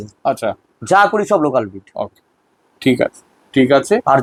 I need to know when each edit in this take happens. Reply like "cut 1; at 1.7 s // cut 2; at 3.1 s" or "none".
none